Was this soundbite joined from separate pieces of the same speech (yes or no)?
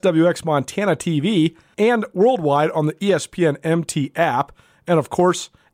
yes